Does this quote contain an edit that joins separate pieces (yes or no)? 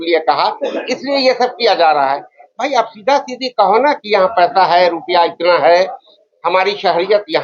no